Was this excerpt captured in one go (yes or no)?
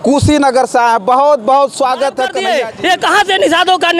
no